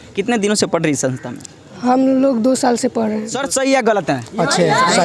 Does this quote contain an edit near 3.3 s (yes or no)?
yes